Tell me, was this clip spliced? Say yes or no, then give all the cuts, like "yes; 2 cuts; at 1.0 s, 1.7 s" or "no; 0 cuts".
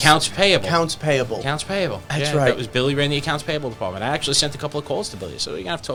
no; 0 cuts